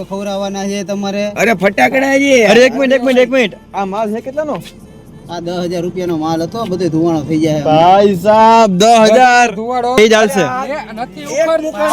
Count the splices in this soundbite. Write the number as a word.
one